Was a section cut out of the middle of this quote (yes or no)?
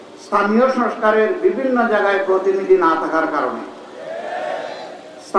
no